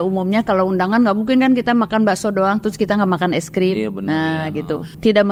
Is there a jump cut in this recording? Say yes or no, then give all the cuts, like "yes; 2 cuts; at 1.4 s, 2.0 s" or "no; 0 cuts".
no; 0 cuts